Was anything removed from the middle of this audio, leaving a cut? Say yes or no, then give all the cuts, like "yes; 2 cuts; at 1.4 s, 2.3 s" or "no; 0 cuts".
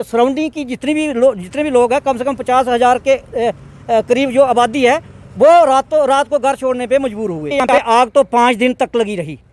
yes; 1 cut; at 7.7 s